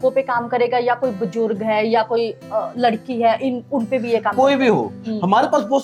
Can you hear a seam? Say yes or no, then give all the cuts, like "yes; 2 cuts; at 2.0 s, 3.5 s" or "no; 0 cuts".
no; 0 cuts